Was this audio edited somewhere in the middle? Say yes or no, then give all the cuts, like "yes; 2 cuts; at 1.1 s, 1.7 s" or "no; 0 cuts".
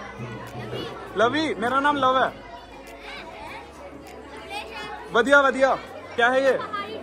yes; 1 cut; at 6.0 s